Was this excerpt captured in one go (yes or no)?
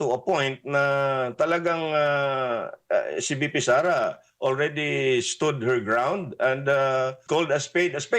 no